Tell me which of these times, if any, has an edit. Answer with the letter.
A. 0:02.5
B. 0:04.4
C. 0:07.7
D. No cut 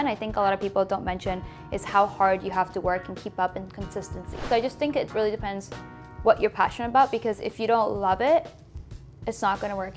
B